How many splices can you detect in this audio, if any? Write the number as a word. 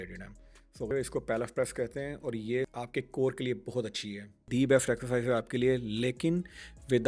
two